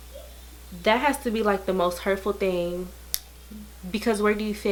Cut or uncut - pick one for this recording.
uncut